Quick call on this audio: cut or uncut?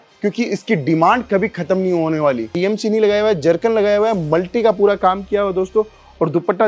cut